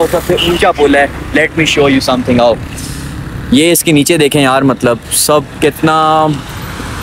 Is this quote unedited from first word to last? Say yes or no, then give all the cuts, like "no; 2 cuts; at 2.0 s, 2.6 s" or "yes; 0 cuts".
yes; 0 cuts